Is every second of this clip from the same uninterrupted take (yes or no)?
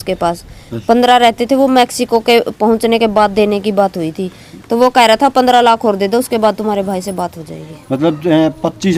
yes